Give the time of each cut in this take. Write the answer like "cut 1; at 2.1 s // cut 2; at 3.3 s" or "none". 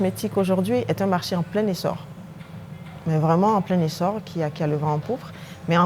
none